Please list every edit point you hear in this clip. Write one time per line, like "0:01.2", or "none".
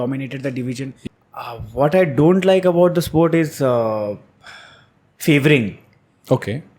0:01.0